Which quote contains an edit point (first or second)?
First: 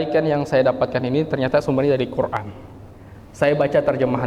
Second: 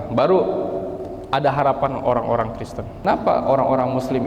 second